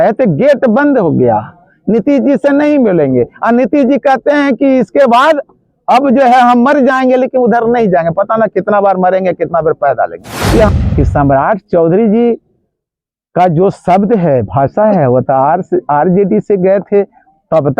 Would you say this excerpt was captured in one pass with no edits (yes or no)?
no